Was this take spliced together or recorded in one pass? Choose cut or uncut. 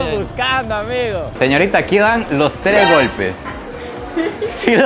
cut